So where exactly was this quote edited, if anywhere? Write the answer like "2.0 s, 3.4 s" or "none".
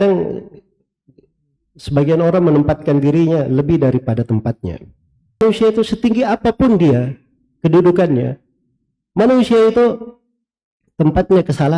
5.4 s